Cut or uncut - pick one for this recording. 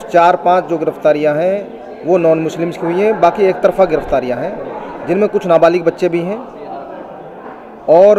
uncut